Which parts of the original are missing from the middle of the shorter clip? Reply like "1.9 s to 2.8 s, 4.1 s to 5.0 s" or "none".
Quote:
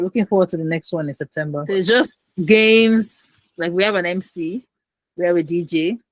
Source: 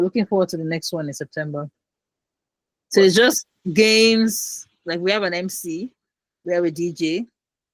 1.7 s to 3.0 s